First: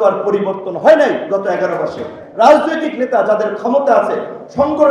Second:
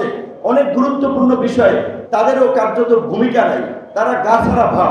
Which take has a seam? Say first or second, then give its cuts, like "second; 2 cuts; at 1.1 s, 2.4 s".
second; 2 cuts; at 2.0 s, 3.8 s